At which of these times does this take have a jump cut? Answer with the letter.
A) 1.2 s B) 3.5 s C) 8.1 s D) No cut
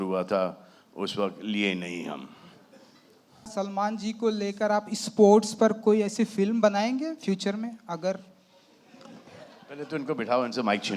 B